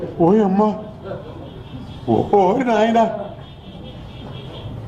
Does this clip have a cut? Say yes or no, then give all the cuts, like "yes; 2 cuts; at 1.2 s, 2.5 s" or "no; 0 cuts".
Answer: no; 0 cuts